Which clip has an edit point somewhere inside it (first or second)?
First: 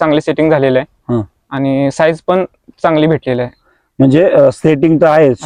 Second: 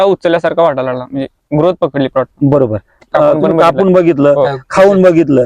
second